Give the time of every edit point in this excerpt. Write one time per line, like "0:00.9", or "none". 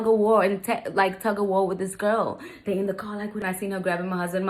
0:03.4